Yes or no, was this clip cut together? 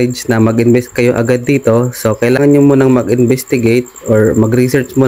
no